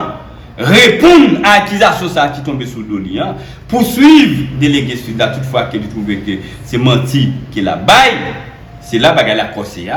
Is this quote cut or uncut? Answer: uncut